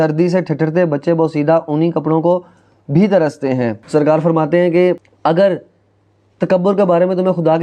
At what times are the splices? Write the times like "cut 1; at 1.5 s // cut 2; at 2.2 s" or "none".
cut 1; at 3.8 s // cut 2; at 5.1 s